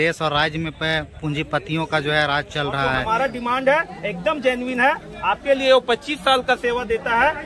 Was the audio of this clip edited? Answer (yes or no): yes